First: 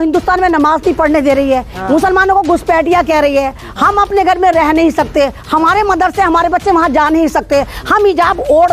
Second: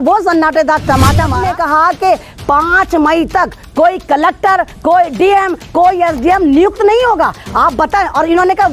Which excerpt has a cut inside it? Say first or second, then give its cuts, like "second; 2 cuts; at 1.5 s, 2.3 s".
second; 1 cut; at 1.4 s